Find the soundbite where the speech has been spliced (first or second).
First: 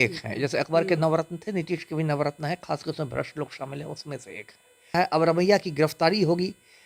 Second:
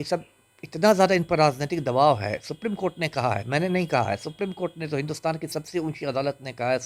first